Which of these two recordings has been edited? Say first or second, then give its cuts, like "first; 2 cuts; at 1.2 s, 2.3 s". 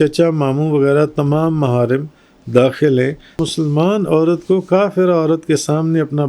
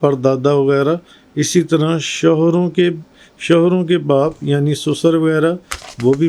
first; 1 cut; at 3.4 s